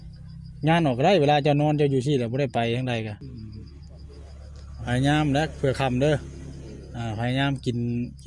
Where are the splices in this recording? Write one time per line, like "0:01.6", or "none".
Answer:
0:03.2

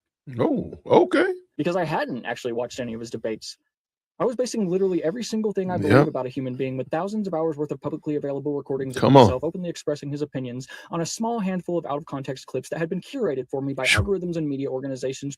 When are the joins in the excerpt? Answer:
0:01.5

